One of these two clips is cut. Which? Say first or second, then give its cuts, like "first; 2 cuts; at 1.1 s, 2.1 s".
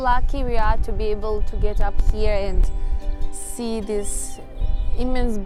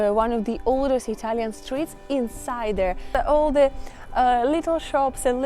second; 1 cut; at 3.1 s